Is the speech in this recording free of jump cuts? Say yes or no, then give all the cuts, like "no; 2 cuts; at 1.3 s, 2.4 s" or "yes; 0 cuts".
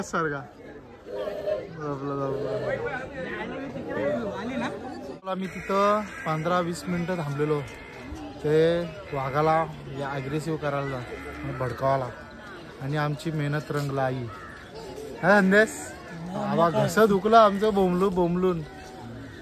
yes; 0 cuts